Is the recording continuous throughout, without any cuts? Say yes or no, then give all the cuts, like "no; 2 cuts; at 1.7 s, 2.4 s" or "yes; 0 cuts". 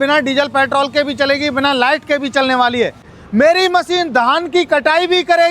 no; 1 cut; at 3.1 s